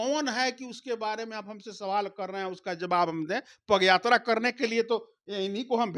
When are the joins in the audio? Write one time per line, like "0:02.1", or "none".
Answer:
none